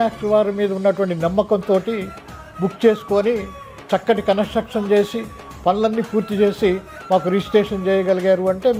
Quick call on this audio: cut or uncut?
uncut